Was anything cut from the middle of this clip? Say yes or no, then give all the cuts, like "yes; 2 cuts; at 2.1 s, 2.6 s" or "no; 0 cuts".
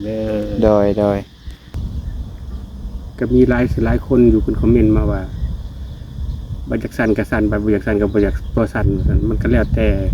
yes; 1 cut; at 1.9 s